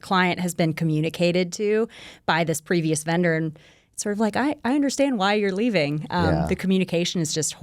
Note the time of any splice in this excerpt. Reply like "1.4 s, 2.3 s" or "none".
none